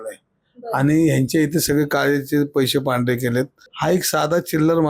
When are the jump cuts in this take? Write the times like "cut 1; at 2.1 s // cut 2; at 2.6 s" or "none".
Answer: cut 1; at 3.6 s